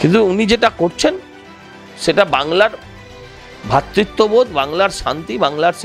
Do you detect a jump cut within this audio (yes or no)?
no